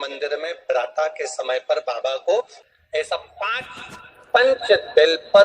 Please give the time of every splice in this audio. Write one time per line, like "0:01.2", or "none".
0:02.6